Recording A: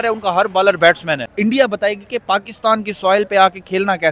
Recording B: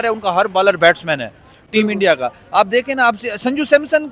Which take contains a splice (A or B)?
A